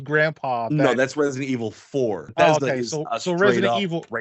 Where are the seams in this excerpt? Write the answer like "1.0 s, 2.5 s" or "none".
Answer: 2.2 s